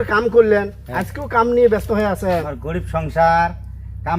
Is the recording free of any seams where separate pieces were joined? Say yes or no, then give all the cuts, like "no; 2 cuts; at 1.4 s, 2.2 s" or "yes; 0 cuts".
no; 1 cut; at 2.5 s